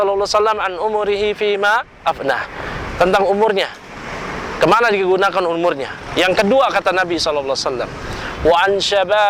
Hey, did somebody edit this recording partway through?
no; 0 cuts

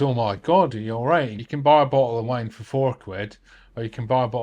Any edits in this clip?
yes; 1 cut; at 1.4 s

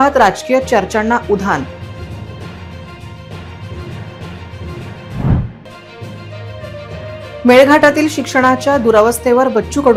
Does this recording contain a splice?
no; 0 cuts

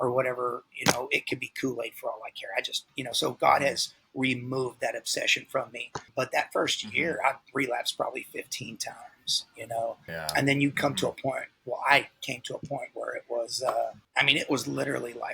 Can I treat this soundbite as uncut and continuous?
no; 4 cuts; at 2.9 s, 6.1 s, 10.2 s, 14.0 s

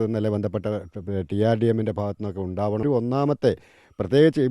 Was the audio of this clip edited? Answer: yes; 1 cut; at 2.8 s

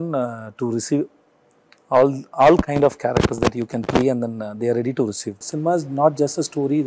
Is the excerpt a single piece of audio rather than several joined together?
no; 1 cut; at 5.4 s

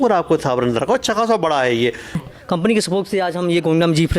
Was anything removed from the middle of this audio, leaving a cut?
yes; 1 cut; at 2.2 s

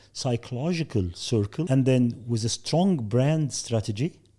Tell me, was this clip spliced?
yes; 1 cut; at 1.7 s

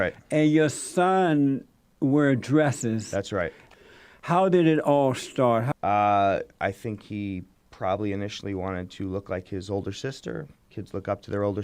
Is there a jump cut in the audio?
yes; 2 cuts; at 3.6 s, 5.7 s

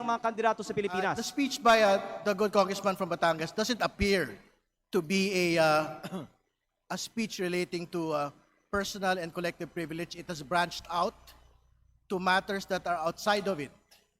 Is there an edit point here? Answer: yes; 1 cut; at 1.2 s

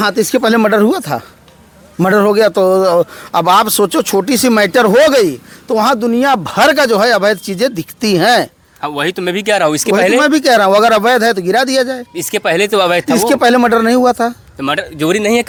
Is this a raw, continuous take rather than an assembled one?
yes; 0 cuts

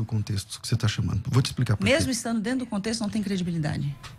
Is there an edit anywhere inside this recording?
no; 0 cuts

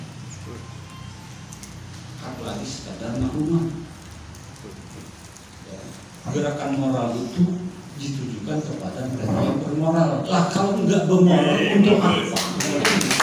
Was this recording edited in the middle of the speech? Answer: no; 0 cuts

